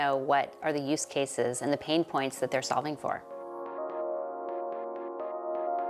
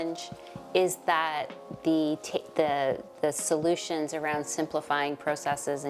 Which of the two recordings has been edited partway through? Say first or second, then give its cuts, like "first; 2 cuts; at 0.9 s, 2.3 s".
first; 1 cut; at 3.7 s